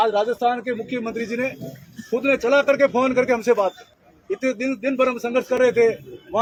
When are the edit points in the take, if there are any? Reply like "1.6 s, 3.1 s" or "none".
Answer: none